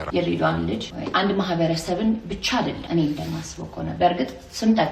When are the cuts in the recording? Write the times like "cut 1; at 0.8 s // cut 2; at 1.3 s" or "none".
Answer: cut 1; at 0.9 s // cut 2; at 2.8 s